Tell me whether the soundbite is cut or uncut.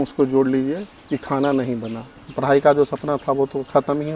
cut